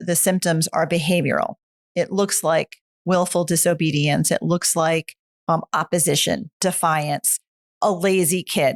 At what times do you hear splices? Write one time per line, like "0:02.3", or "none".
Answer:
none